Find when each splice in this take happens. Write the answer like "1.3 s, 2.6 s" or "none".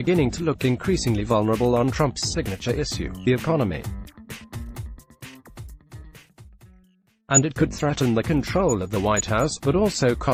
none